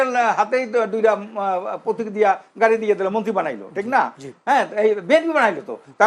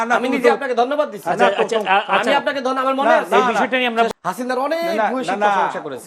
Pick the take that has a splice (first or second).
second